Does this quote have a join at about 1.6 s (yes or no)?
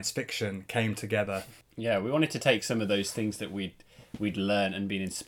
yes